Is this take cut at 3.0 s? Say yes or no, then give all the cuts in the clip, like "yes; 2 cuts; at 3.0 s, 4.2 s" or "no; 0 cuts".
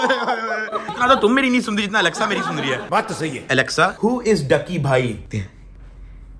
yes; 2 cuts; at 0.9 s, 3.0 s